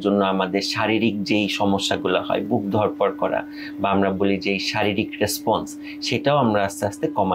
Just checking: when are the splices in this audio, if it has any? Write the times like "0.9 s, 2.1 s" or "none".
none